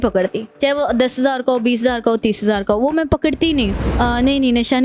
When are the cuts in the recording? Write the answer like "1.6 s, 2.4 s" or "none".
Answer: 3.7 s